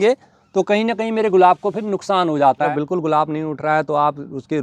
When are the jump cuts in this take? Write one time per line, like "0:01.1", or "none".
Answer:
0:02.7